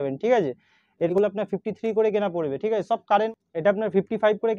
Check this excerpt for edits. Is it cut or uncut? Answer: cut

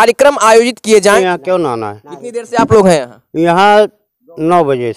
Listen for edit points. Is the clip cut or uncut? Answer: cut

